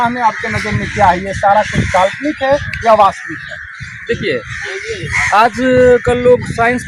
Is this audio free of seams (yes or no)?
yes